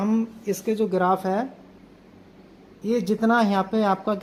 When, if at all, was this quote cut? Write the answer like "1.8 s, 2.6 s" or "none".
none